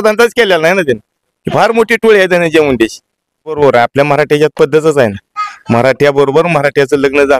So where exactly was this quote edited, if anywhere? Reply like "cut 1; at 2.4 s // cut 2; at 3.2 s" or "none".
cut 1; at 3.6 s